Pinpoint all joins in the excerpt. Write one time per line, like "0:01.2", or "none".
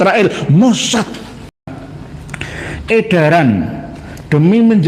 0:01.7